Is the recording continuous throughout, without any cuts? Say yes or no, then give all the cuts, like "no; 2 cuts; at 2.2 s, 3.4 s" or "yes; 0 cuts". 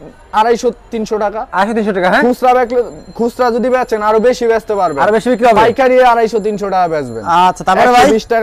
yes; 0 cuts